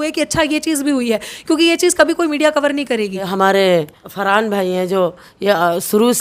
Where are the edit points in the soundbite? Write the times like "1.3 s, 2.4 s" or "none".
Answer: 3.2 s, 4.0 s